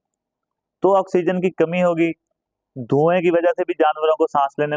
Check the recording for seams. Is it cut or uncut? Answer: uncut